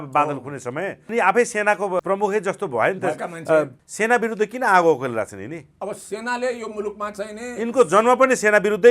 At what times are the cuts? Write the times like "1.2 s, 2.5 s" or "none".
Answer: 1.1 s, 2.0 s, 3.8 s